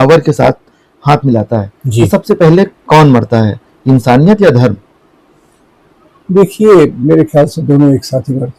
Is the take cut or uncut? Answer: uncut